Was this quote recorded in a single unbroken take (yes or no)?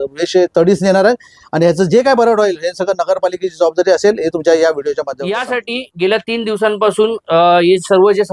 no